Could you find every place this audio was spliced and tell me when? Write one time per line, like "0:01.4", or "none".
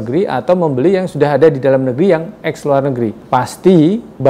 0:03.2